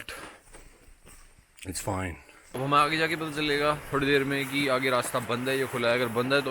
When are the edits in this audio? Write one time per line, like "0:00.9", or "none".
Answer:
0:02.5